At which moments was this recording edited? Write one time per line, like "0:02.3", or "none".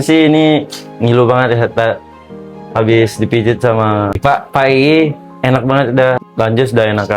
0:04.2
0:06.3